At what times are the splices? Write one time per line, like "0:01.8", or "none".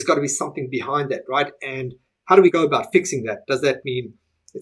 0:02.5